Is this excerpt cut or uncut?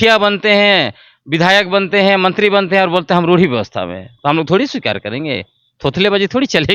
uncut